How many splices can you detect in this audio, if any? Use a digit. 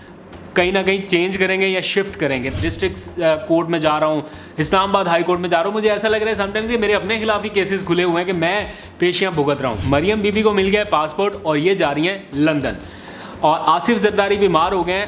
2